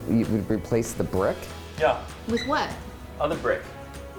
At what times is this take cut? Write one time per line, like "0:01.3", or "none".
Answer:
none